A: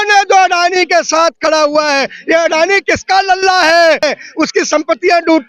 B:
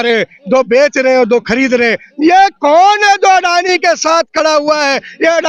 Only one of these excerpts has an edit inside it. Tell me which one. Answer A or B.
A